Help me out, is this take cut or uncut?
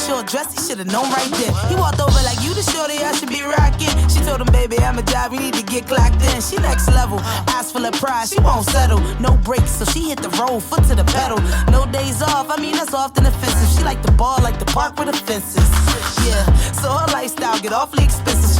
uncut